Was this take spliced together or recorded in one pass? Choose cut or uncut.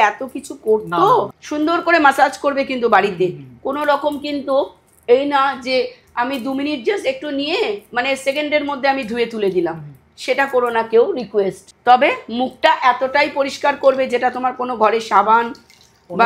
cut